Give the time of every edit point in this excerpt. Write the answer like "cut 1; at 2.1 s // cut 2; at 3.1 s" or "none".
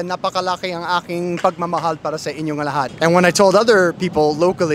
cut 1; at 2.9 s